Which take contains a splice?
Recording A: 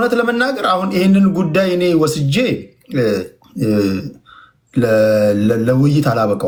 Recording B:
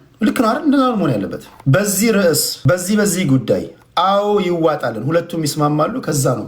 B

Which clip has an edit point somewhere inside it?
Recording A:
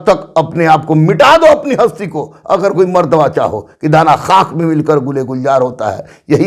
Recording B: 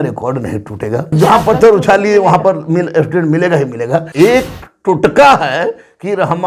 B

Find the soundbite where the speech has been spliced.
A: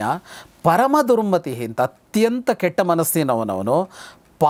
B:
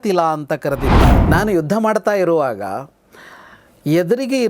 B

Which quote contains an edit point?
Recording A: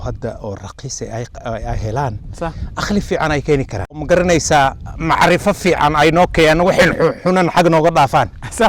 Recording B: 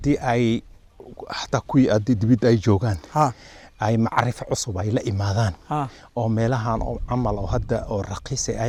A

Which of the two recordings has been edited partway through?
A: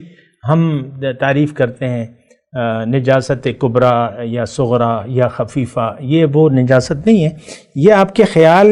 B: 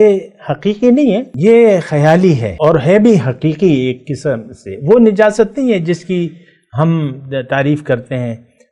B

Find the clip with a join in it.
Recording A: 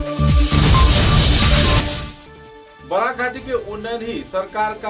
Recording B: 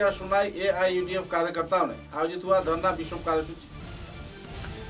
A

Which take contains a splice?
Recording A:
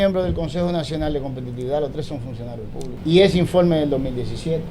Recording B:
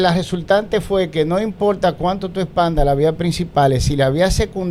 A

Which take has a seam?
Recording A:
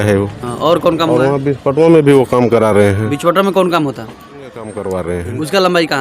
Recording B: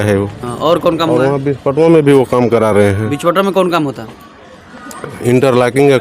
A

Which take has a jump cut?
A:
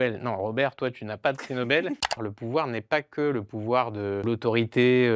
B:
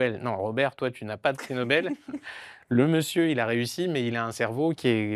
A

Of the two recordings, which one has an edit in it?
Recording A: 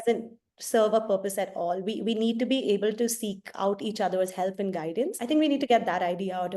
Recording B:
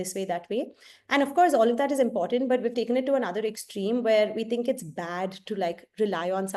A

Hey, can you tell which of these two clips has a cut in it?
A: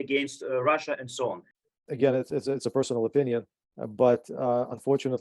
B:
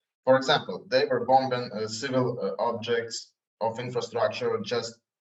A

